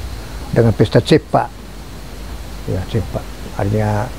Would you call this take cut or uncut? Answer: uncut